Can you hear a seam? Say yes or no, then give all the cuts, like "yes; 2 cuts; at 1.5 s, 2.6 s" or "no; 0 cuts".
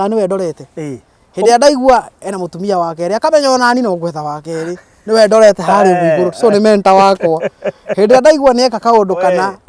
no; 0 cuts